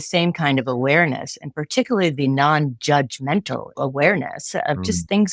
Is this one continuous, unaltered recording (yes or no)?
no